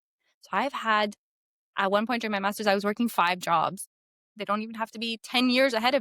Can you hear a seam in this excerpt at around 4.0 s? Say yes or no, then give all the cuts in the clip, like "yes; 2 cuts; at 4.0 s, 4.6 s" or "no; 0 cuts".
yes; 1 cut; at 4.0 s